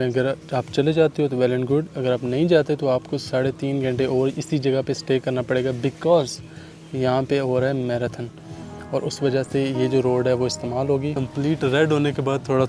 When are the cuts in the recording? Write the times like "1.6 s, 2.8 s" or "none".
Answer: 11.1 s

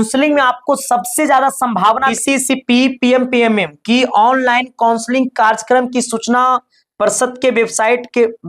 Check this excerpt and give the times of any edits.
2.2 s

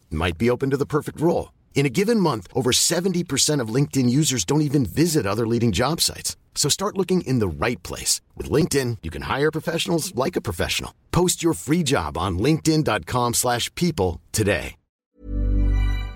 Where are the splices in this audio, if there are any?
15.2 s

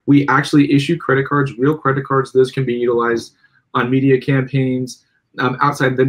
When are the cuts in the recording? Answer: none

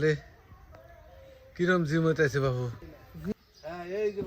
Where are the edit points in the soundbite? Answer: 3.3 s

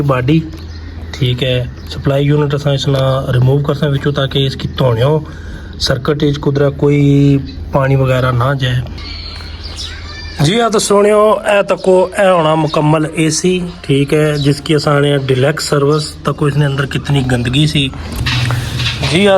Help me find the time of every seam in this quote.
9.1 s, 18.1 s

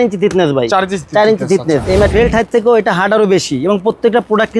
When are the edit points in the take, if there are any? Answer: 2.1 s

